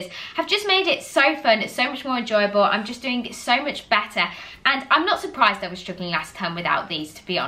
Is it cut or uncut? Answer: uncut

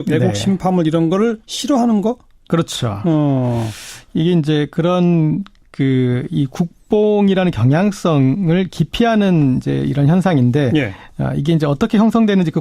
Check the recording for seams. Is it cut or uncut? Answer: uncut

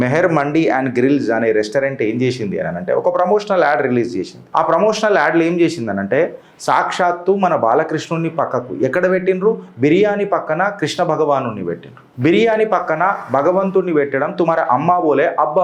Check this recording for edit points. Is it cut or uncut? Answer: uncut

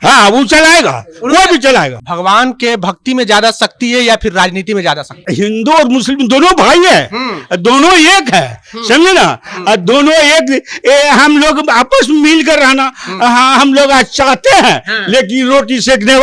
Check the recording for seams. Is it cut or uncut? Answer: cut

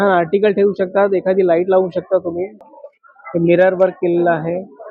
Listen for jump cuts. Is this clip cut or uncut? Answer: cut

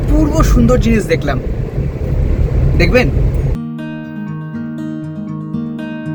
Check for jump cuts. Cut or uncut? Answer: uncut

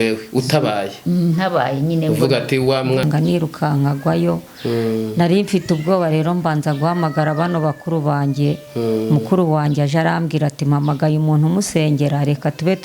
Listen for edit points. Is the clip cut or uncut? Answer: cut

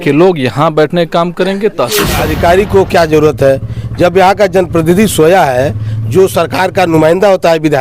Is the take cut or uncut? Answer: cut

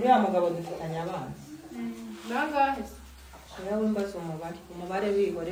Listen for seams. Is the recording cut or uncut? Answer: uncut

